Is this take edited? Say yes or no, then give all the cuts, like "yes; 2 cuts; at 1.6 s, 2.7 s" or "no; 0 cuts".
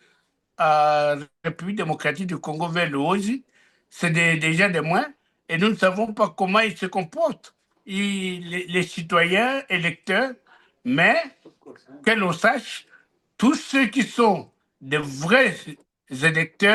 no; 0 cuts